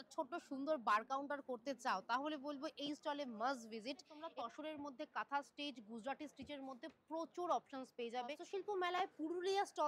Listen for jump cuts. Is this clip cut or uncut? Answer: cut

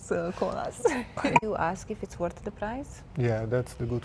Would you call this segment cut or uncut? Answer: cut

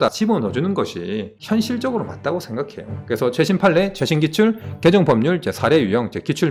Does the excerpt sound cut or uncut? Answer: uncut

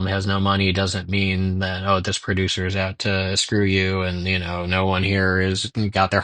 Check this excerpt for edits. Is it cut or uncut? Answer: uncut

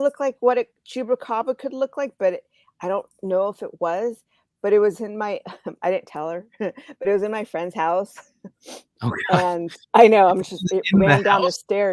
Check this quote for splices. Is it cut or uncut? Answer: uncut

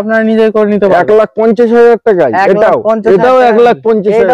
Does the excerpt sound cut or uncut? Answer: uncut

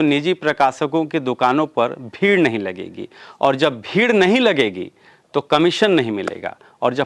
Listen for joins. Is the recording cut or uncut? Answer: uncut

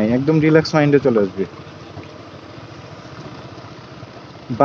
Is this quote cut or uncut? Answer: uncut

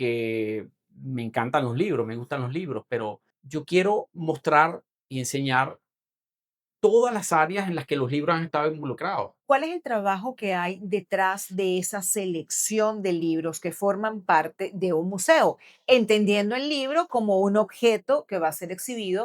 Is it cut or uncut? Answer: cut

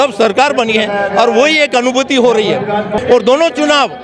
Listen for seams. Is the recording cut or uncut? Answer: cut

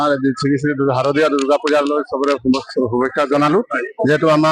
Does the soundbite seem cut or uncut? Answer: uncut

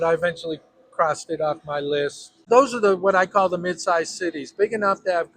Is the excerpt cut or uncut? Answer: cut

